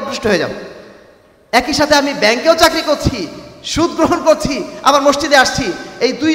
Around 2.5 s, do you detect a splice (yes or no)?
no